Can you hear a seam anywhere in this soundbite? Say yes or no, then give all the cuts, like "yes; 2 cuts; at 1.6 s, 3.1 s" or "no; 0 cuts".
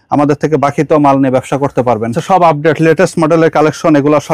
yes; 1 cut; at 2.2 s